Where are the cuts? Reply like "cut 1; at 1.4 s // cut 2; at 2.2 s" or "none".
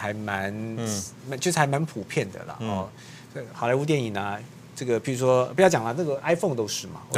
none